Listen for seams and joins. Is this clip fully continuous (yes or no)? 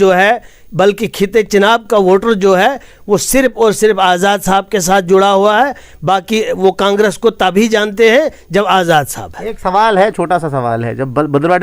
yes